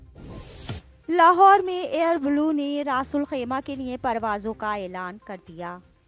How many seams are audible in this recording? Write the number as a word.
one